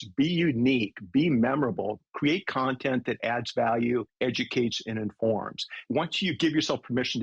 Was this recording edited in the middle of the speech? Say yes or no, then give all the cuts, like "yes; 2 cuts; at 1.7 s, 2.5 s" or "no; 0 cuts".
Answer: yes; 2 cuts; at 4.1 s, 5.8 s